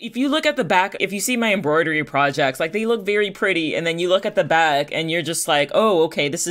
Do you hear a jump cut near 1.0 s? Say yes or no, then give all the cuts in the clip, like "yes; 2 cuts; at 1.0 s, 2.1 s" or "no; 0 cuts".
yes; 1 cut; at 1.0 s